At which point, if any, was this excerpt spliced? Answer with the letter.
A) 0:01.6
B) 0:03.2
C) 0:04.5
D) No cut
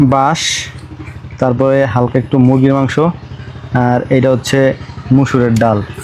D